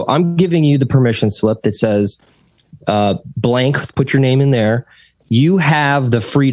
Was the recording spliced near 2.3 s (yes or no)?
no